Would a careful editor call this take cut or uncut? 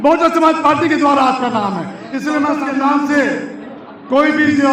cut